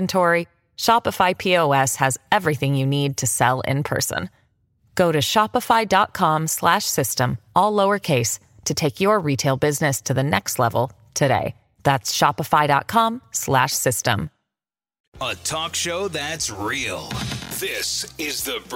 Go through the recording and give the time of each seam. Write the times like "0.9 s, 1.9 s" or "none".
none